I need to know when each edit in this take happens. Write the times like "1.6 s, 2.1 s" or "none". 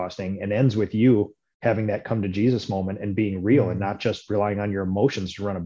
none